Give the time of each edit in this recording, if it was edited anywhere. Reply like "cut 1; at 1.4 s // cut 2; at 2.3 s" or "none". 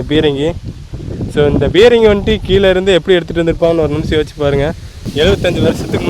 cut 1; at 5.1 s